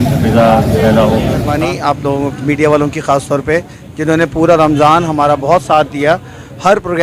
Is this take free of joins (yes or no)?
no